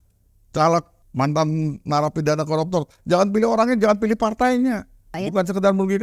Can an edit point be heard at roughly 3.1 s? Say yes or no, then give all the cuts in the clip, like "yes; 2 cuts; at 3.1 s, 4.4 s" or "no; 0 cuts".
no; 2 cuts; at 1.0 s, 5.1 s